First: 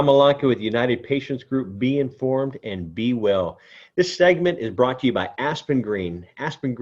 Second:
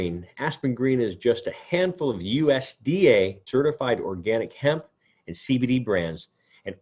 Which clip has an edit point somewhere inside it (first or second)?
second